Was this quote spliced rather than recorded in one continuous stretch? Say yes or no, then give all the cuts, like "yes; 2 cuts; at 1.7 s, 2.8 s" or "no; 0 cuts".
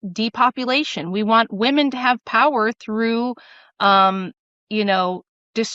no; 0 cuts